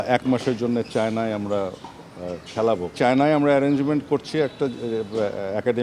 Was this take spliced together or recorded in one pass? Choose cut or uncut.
cut